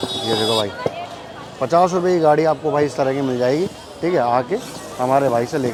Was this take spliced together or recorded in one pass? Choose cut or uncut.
uncut